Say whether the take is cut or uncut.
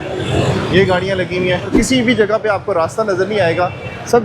cut